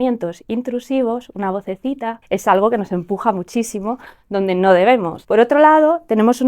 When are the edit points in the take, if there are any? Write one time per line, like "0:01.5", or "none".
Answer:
0:02.1
0:05.2